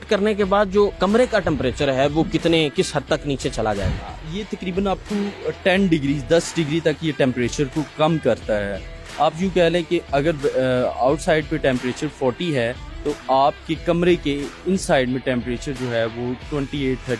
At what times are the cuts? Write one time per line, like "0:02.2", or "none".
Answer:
none